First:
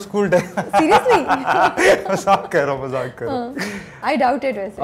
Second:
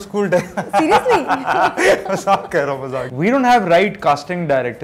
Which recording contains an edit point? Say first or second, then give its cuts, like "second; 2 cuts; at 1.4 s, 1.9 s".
second; 1 cut; at 3.1 s